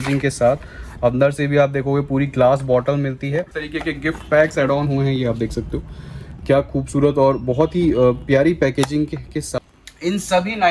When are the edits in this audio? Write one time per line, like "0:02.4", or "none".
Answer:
0:03.6
0:09.5